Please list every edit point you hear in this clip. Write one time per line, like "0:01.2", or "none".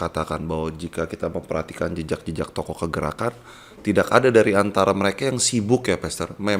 none

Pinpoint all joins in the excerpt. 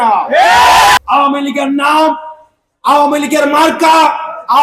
0:01.0

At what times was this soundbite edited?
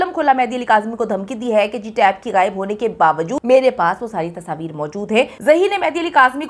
0:03.4
0:05.3

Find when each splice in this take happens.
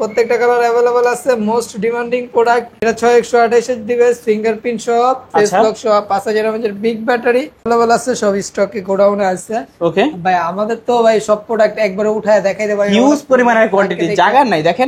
0:02.8
0:07.6

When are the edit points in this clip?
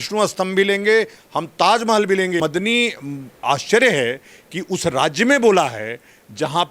0:02.4

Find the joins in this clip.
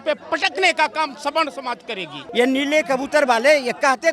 0:02.2

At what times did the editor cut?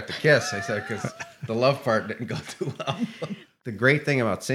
0:03.5

